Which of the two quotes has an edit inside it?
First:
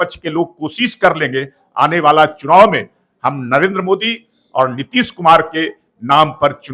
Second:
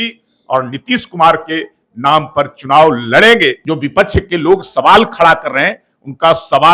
second; 1 cut; at 3.6 s

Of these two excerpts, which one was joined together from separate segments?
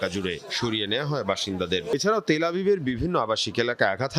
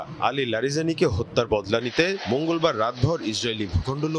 first; 1 cut; at 1.9 s

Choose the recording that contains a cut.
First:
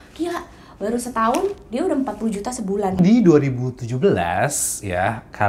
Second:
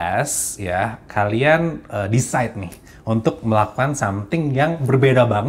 first; 1 cut; at 3.0 s

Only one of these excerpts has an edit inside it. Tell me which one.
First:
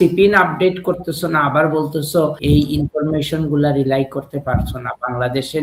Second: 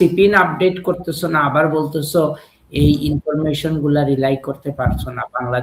first; 1 cut; at 2.4 s

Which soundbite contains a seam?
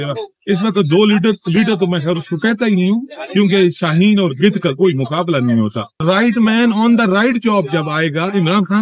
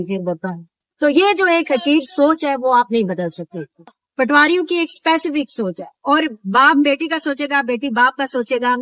first; 1 cut; at 5.9 s

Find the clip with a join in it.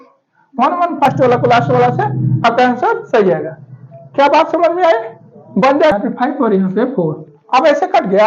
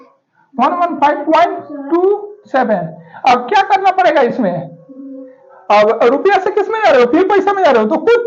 first; 2 cuts; at 1.1 s, 5.9 s

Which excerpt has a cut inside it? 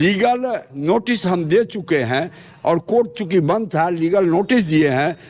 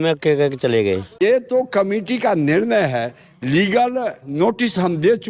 second; 1 cut; at 1.2 s

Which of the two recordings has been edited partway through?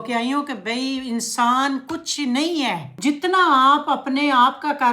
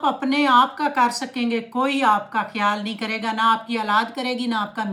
first; 1 cut; at 2.9 s

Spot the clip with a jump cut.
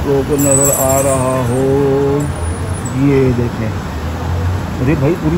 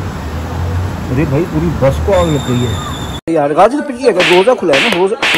second; 1 cut; at 3.3 s

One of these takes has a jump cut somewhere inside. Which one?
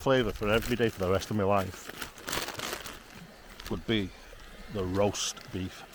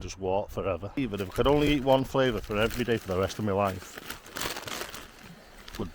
second; 1 cut; at 1.0 s

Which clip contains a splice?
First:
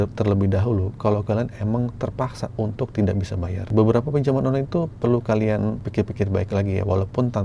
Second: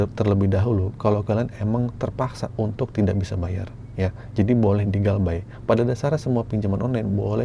first; 2 cuts; at 3.7 s, 5.9 s

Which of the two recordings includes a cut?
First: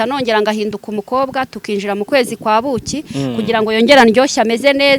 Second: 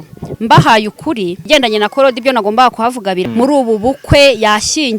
second; 2 cuts; at 1.4 s, 3.3 s

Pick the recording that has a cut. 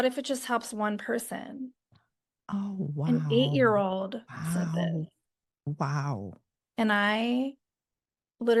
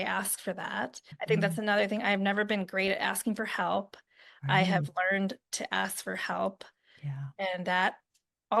second; 1 cut; at 1.1 s

